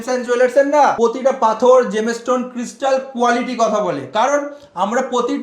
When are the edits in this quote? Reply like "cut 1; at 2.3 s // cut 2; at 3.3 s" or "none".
cut 1; at 0.9 s